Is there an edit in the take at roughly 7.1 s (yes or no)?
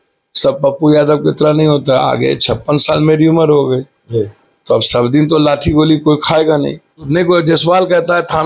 yes